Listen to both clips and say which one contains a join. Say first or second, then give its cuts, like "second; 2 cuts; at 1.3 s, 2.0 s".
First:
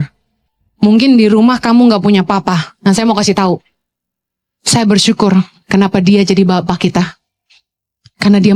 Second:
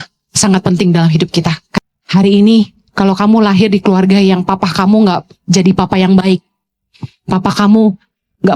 second; 1 cut; at 1.6 s